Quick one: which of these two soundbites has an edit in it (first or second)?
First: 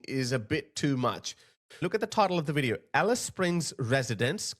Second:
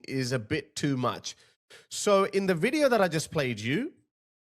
first